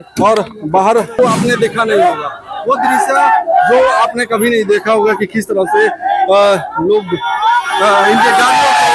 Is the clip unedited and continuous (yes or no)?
no